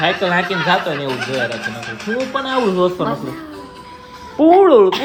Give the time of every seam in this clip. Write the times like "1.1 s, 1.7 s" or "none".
none

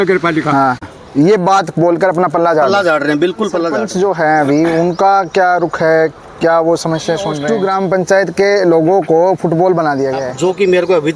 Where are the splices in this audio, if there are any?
0.9 s, 3.8 s, 7.4 s, 10.2 s

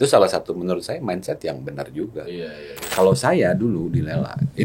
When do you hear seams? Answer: 2.9 s

